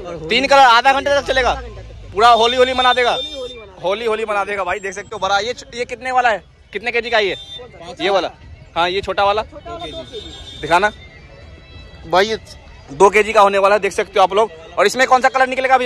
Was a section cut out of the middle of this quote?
no; 0 cuts

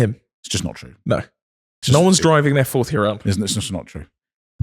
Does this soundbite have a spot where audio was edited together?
no; 0 cuts

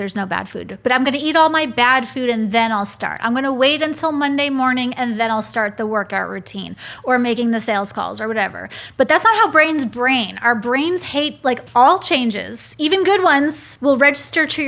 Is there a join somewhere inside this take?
yes; 2 cuts; at 11.6 s, 13.7 s

